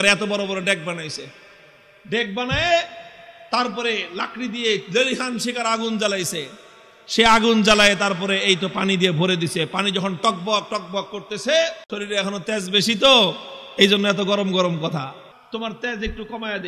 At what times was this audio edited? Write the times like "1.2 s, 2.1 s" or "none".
11.9 s, 15.3 s